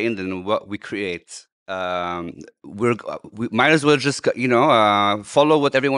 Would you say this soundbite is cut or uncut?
uncut